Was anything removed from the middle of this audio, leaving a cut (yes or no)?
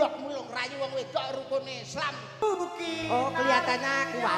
yes